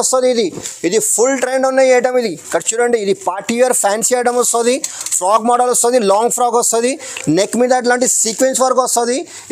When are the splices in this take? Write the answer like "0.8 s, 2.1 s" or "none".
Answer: none